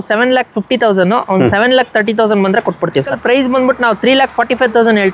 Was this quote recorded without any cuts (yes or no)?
no